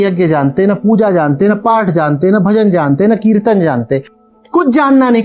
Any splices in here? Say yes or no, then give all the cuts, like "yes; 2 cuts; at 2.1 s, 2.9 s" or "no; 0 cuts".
yes; 1 cut; at 4.1 s